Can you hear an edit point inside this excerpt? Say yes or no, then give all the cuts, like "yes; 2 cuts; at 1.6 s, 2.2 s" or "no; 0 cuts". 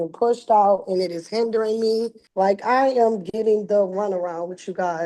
yes; 1 cut; at 2.2 s